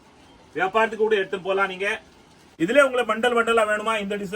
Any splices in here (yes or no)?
yes